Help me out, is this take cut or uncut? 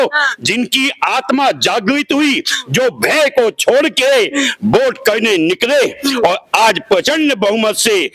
uncut